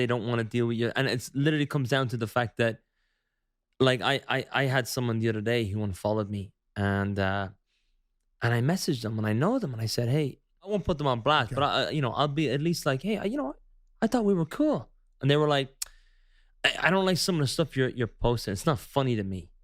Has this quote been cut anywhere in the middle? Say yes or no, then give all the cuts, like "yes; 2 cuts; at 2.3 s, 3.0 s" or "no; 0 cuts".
yes; 1 cut; at 10.7 s